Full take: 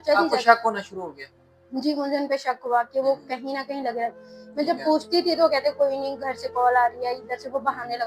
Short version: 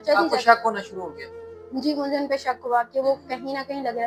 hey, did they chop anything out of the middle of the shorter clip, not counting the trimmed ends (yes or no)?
no